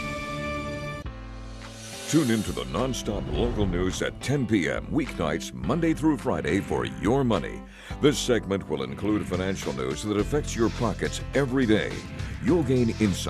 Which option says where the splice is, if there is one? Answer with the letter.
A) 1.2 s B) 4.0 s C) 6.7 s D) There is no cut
A